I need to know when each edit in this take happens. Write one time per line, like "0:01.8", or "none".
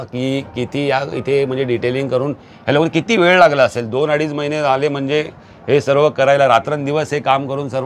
none